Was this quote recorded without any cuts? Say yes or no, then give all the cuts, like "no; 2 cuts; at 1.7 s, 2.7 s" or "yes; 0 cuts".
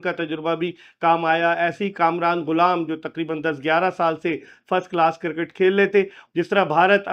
no; 1 cut; at 6.2 s